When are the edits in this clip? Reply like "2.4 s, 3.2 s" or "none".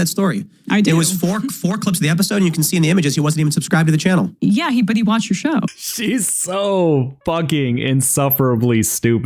4.3 s, 5.6 s